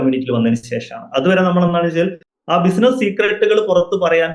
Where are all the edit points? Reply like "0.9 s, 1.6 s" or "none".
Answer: 2.3 s